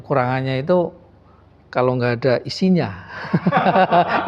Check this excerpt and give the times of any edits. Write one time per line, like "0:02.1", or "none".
none